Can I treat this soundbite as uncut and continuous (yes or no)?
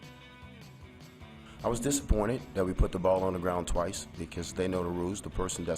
no